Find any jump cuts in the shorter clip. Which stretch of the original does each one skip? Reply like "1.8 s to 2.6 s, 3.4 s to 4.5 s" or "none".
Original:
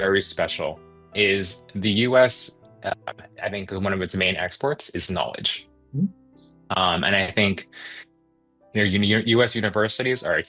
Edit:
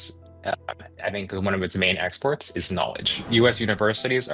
5.7 s to 9.2 s